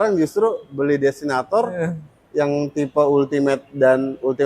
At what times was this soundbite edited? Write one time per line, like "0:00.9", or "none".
none